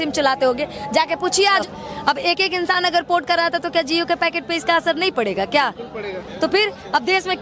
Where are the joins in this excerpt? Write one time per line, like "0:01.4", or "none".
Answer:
0:01.6

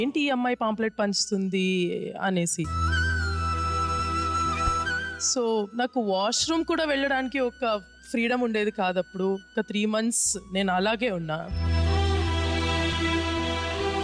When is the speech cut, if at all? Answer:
0:09.5
0:11.5

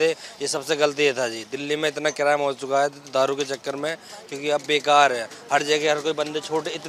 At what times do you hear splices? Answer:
none

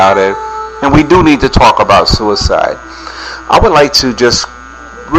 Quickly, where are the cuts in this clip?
none

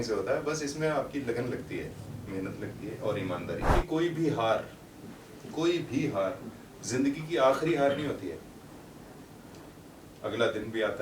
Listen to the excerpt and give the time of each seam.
0:03.7

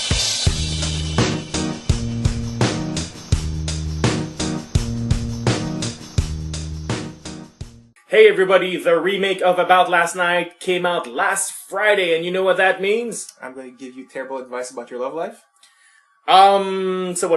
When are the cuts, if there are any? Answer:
none

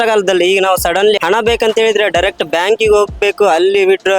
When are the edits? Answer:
0:01.2

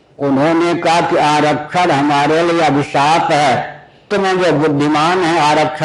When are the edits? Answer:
0:04.1

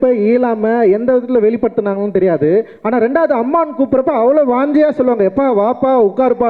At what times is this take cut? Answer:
none

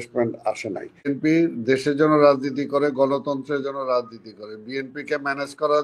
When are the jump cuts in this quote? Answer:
0:01.1

